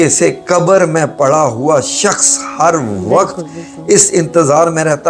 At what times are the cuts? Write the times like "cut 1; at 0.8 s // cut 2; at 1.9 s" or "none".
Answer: none